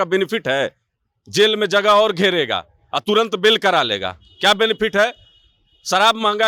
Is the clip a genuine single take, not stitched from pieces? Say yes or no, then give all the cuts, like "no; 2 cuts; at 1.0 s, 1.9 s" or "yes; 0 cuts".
yes; 0 cuts